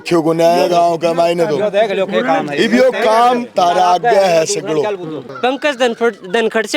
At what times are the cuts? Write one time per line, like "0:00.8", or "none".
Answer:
0:05.2